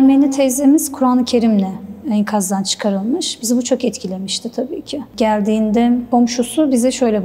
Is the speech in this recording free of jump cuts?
yes; 0 cuts

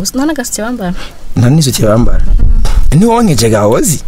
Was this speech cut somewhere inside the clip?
yes; 1 cut; at 2.8 s

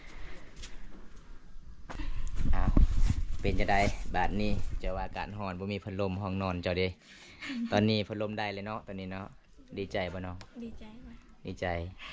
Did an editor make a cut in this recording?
yes; 1 cut; at 2.0 s

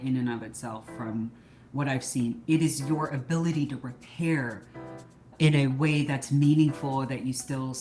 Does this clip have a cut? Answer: yes; 1 cut; at 5.3 s

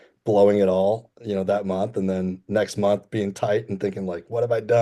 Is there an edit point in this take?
no; 0 cuts

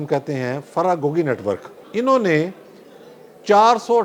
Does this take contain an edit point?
yes; 1 cut; at 1.7 s

